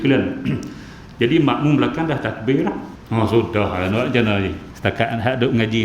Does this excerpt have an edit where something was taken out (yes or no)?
yes